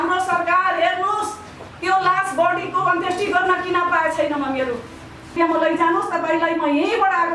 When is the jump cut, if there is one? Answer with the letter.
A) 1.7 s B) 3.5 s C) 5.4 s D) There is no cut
C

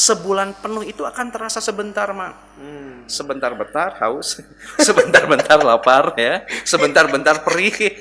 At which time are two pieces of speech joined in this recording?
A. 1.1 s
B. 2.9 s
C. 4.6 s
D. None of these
D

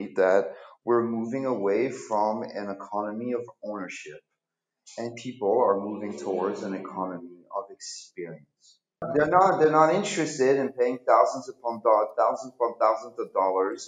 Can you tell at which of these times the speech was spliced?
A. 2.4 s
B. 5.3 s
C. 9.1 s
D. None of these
C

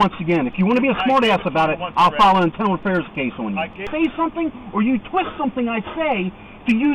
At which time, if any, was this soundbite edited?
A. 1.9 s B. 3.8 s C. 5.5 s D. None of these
B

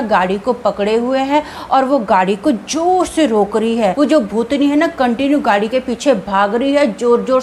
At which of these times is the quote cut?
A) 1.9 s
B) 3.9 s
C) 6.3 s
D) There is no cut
B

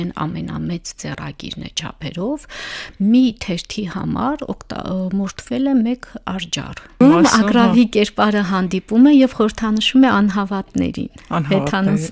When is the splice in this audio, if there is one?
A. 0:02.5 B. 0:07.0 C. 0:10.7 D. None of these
B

